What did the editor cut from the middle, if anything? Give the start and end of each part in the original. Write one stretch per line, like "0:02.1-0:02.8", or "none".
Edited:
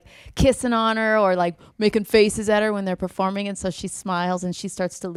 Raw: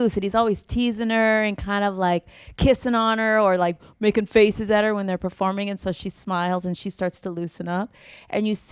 none